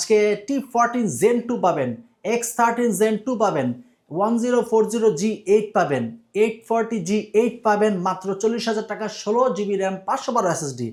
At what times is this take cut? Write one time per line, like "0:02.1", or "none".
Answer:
none